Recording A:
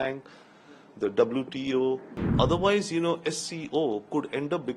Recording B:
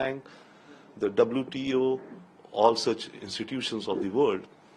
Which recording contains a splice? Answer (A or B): A